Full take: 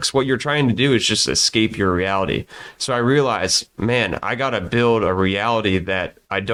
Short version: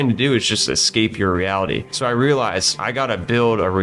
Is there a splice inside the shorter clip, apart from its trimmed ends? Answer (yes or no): yes